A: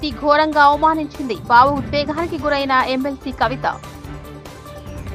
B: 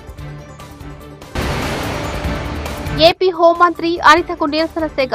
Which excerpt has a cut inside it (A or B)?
B